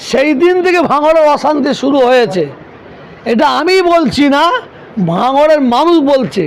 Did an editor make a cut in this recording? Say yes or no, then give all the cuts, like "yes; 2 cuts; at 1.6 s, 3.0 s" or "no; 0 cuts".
no; 0 cuts